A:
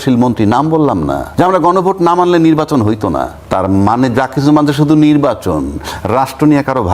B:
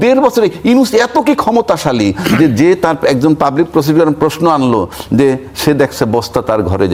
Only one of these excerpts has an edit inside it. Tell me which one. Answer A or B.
A